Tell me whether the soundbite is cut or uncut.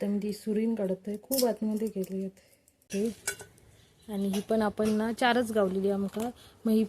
cut